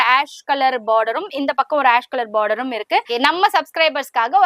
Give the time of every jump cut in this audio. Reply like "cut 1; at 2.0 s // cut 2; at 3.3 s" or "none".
cut 1; at 3.1 s